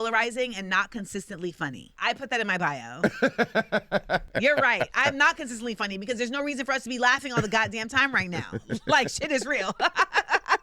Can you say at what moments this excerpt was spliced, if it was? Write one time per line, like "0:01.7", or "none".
0:01.9
0:04.3